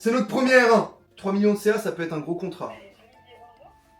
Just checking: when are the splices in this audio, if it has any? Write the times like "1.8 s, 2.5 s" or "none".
1.0 s